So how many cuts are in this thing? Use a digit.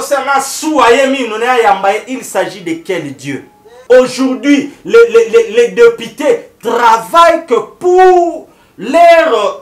1